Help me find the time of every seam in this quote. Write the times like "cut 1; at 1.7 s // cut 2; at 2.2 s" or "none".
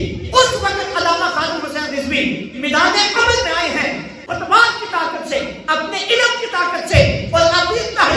cut 1; at 4.2 s